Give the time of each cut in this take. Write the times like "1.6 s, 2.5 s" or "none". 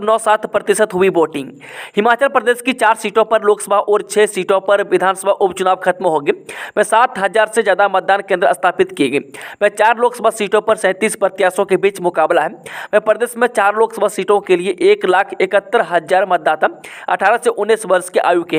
none